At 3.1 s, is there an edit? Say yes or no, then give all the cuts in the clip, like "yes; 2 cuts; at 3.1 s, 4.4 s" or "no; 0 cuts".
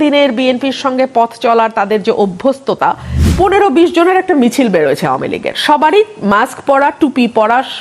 yes; 1 cut; at 3.1 s